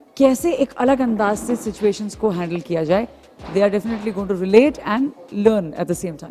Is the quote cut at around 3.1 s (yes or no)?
no